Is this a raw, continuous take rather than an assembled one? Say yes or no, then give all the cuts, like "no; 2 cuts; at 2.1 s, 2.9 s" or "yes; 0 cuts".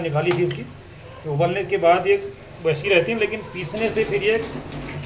yes; 0 cuts